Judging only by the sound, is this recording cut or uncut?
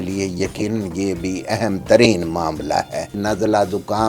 cut